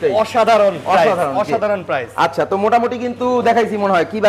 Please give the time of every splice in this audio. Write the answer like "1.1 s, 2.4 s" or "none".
none